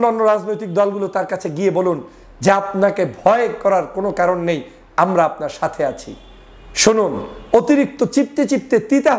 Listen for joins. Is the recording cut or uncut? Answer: uncut